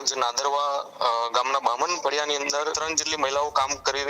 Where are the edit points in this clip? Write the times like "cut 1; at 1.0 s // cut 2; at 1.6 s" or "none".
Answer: cut 1; at 2.8 s